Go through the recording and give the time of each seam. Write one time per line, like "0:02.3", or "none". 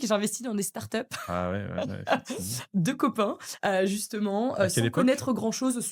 none